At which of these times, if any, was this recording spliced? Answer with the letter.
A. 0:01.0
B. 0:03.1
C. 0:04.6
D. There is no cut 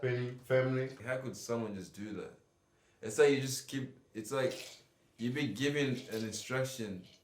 A